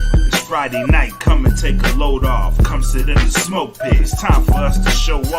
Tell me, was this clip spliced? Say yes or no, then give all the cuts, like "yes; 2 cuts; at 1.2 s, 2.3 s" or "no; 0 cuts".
yes; 1 cut; at 1.1 s